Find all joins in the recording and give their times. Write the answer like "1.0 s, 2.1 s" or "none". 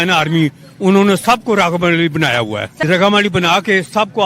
2.8 s

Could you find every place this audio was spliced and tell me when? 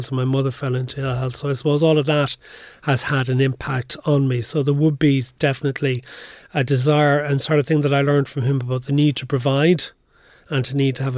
none

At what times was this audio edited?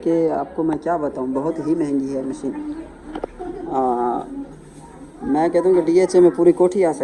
none

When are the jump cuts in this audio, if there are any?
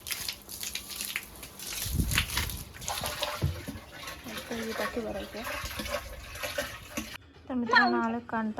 7.1 s

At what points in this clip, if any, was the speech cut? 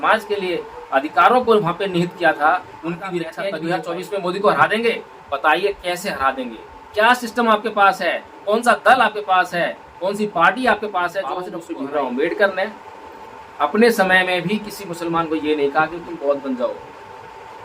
3.4 s, 11.6 s

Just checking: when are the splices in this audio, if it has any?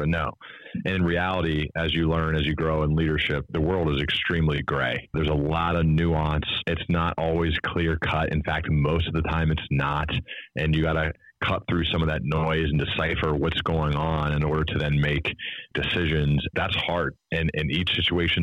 3.5 s, 5.1 s, 6.6 s, 11.1 s, 15.7 s, 16.5 s

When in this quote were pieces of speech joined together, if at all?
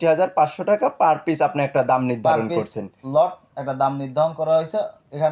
none

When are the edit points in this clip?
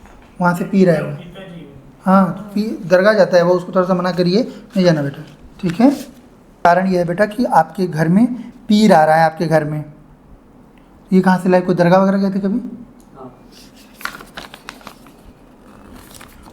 6.7 s

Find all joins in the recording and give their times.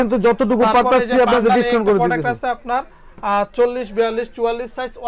none

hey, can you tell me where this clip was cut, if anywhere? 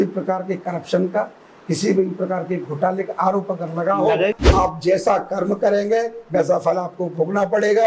4.3 s

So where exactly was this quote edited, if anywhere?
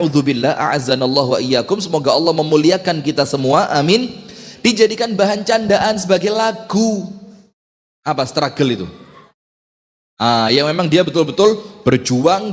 7.9 s

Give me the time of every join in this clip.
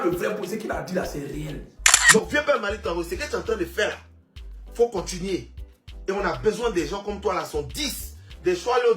2.0 s

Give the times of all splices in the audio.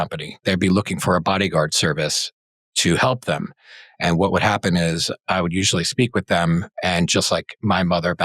none

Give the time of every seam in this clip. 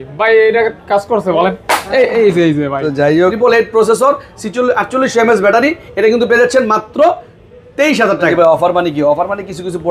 3.3 s, 8.2 s

